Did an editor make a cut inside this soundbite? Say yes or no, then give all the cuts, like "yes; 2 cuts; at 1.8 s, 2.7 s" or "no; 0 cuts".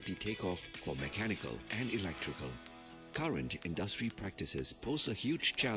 no; 0 cuts